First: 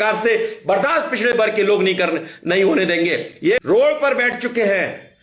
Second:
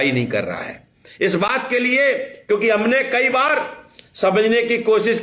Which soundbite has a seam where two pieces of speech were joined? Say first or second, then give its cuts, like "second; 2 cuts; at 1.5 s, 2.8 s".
first; 1 cut; at 3.6 s